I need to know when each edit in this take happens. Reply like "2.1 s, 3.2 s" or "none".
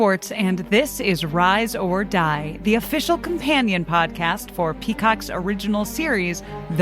none